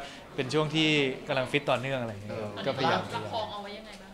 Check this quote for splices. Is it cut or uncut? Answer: uncut